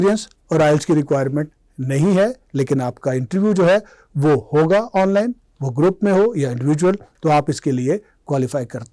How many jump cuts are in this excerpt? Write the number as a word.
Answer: zero